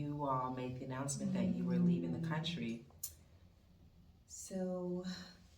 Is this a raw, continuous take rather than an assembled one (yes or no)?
no